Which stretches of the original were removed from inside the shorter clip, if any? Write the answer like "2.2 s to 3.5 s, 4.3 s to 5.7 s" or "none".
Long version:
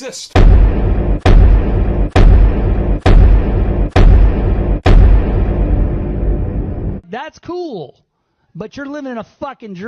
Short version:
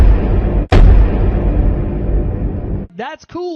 3.8 s to 5.6 s